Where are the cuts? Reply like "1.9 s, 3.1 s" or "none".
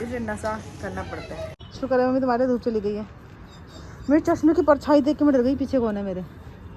1.6 s